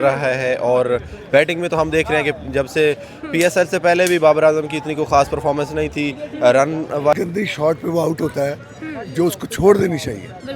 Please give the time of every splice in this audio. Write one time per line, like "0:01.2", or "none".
0:07.1